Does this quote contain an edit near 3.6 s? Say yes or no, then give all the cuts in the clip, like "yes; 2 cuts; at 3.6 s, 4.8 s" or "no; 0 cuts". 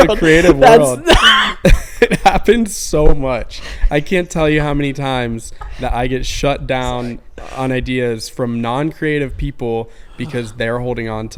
no; 0 cuts